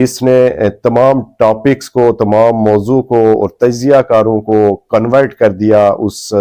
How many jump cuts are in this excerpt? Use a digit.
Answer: 0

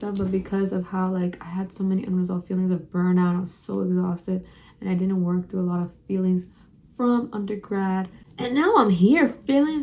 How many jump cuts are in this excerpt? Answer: 1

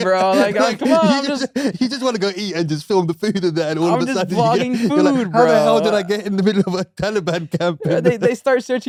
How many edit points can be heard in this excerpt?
0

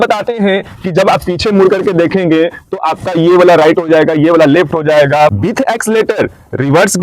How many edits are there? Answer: 1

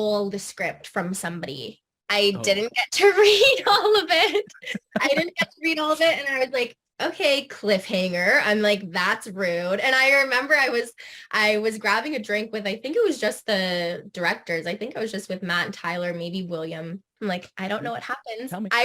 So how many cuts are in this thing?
1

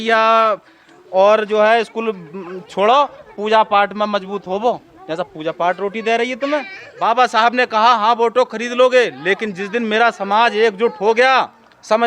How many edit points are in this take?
1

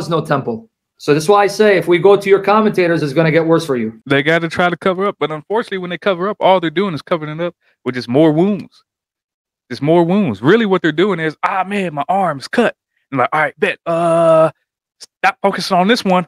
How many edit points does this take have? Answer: 1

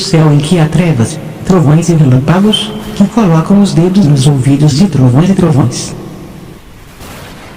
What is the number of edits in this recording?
1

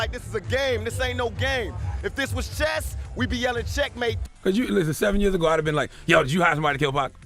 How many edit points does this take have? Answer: 1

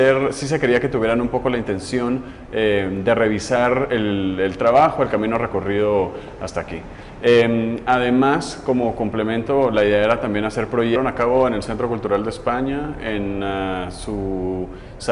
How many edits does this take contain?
0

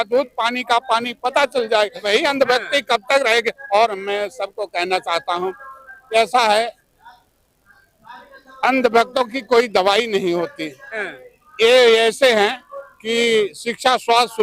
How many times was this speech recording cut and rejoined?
1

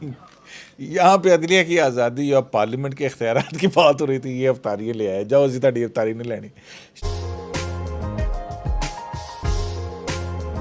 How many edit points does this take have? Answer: 1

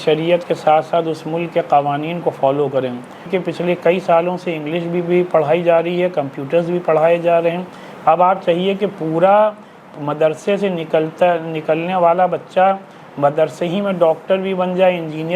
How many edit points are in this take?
1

